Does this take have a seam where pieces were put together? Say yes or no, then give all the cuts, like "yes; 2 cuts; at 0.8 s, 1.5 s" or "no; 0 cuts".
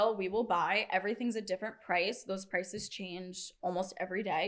no; 0 cuts